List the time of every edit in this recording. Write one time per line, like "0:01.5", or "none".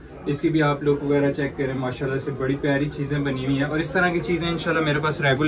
none